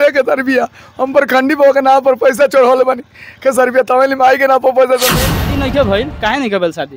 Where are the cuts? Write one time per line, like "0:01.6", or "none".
0:05.1